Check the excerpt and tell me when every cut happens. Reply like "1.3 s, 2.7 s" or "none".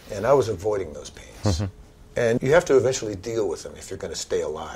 2.4 s